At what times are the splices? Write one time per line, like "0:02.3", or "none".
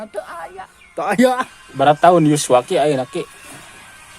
0:01.3